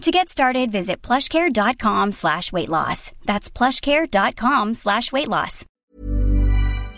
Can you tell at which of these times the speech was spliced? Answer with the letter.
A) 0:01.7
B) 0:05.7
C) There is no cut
B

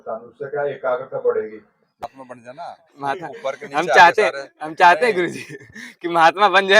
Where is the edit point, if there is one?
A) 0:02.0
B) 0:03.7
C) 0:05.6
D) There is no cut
A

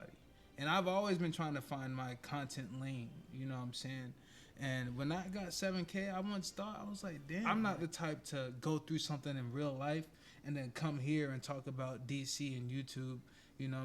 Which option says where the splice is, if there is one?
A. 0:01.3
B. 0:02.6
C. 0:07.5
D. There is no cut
C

